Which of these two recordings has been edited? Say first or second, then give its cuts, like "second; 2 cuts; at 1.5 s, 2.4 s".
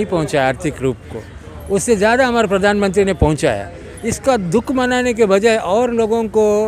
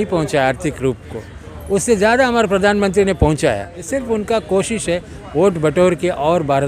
second; 1 cut; at 3.7 s